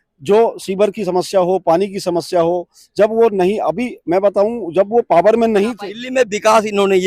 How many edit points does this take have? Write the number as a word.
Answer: one